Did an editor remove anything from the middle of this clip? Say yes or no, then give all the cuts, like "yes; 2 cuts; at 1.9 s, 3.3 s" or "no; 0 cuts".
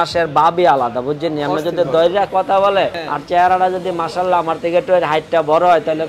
yes; 1 cut; at 3.1 s